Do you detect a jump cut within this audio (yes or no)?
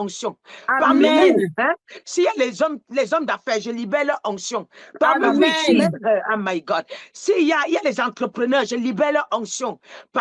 no